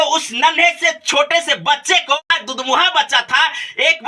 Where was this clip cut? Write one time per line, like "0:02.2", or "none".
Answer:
0:02.2